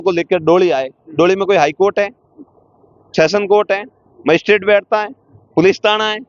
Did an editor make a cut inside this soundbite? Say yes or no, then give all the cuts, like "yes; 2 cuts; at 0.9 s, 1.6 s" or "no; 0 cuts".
no; 0 cuts